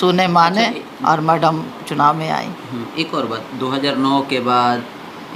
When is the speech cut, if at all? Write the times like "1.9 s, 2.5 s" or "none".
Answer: none